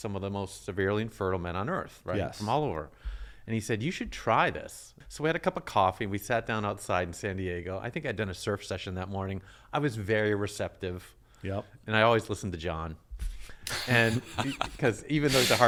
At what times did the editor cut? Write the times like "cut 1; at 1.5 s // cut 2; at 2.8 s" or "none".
none

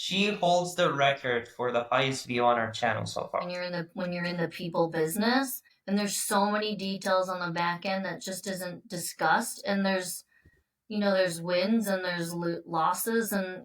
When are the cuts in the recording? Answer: cut 1; at 3.5 s

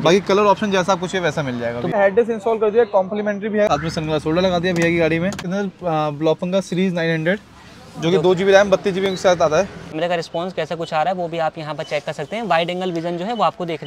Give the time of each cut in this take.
cut 1; at 1.9 s // cut 2; at 3.7 s // cut 3; at 5.4 s // cut 4; at 10.0 s

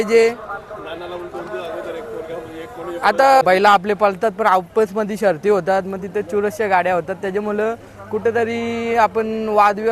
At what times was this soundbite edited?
cut 1; at 3.4 s

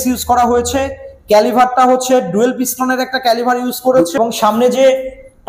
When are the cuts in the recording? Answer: cut 1; at 4.2 s

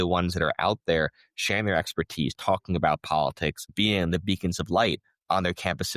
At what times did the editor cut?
cut 1; at 3.7 s

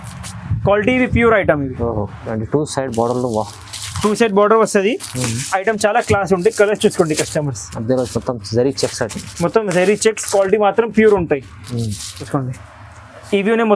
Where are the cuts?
cut 1; at 2.3 s // cut 2; at 12.1 s

